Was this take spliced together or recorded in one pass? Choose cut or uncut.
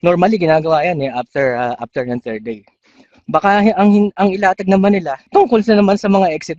cut